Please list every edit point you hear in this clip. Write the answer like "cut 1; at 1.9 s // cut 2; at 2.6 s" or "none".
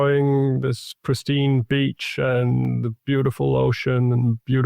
none